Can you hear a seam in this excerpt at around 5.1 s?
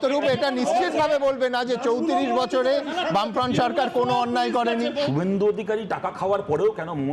yes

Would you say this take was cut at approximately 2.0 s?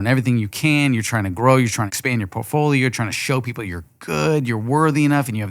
yes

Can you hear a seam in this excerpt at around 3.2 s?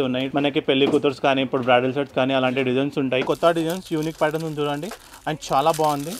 yes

